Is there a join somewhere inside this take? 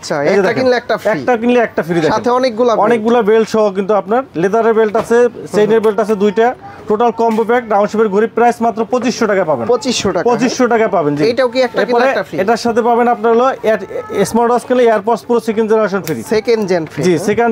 no; 0 cuts

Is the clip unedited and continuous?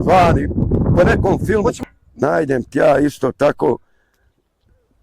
no; 1 cut; at 1.8 s

